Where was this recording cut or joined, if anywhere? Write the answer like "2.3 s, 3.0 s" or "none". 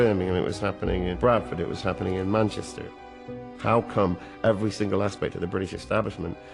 1.1 s, 3.2 s